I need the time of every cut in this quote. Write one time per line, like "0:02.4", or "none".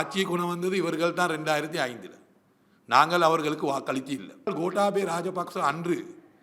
0:04.5

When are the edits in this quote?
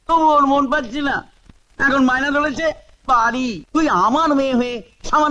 0:03.6

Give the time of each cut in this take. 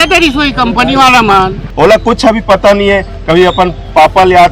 0:01.6

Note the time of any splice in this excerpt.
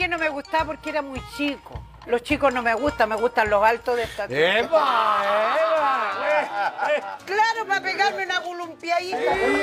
0:01.9

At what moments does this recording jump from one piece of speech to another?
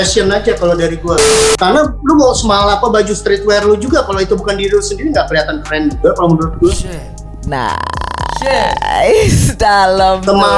0:01.6

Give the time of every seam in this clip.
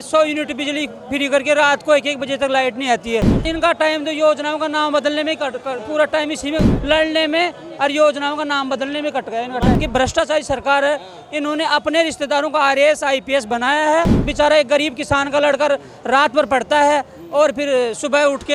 0:03.5
0:06.7
0:09.8
0:14.2

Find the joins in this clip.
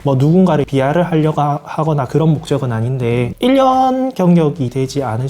0:03.3

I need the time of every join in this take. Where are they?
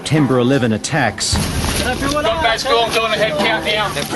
0:01.7

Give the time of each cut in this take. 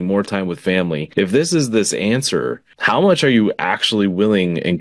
0:01.1
0:02.7

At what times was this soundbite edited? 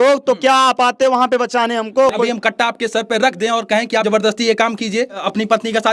0:02.1
0:04.0
0:05.2

